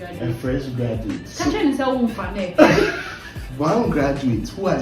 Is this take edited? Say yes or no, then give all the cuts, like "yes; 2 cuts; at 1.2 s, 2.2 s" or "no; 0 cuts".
yes; 2 cuts; at 1.3 s, 3.4 s